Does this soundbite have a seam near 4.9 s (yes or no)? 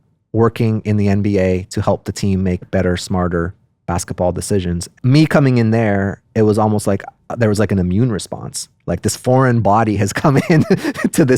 yes